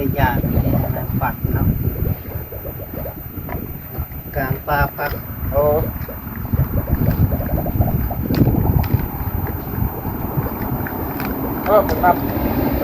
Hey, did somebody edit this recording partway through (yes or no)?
no